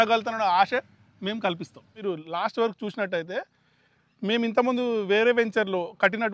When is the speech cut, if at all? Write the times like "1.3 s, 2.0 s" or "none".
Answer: 2.0 s